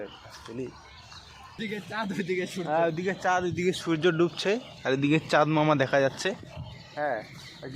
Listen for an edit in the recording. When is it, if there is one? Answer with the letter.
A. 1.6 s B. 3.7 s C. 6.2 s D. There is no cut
A